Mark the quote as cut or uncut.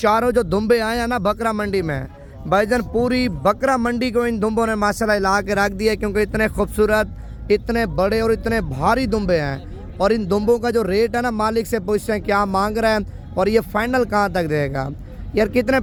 uncut